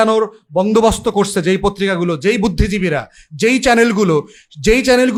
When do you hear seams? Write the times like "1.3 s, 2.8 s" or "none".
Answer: none